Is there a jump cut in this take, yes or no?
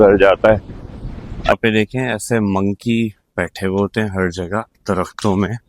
yes